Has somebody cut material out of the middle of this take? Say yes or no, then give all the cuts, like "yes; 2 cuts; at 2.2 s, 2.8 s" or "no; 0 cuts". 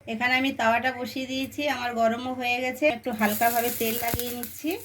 yes; 1 cut; at 2.9 s